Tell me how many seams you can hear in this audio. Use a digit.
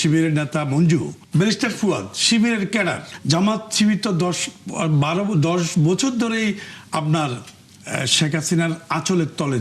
2